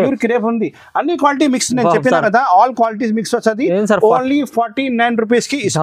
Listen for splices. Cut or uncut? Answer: uncut